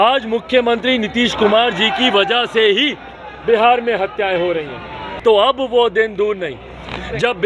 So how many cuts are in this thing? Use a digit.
1